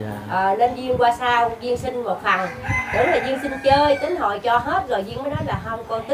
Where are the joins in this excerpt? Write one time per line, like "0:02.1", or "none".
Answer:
none